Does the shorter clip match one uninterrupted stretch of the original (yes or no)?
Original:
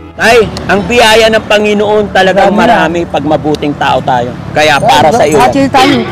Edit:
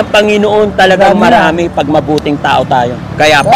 yes